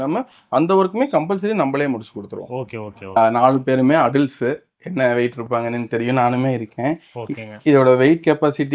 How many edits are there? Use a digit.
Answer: 1